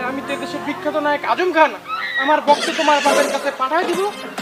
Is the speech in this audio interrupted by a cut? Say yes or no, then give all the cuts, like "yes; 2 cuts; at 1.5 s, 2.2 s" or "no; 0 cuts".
no; 0 cuts